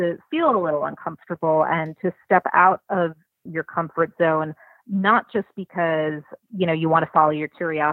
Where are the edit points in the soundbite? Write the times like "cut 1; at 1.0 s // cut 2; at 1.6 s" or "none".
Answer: cut 1; at 3.5 s // cut 2; at 6.3 s